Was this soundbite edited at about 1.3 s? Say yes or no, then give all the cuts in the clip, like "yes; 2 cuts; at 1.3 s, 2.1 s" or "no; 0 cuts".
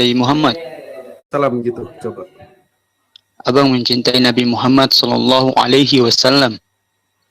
yes; 1 cut; at 1.3 s